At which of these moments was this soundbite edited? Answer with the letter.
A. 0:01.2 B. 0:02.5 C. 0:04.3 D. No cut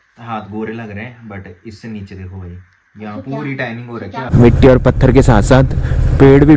C